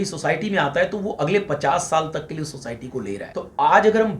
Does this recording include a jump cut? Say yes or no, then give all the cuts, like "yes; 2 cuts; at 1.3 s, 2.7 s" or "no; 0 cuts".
yes; 1 cut; at 3.3 s